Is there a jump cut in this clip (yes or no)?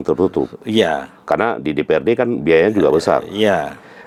no